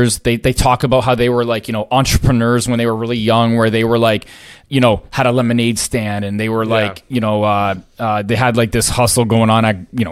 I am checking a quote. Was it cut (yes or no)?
no